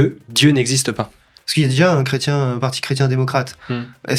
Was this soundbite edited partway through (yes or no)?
yes